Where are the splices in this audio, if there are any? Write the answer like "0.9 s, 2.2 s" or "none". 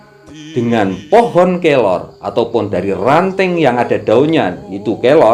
none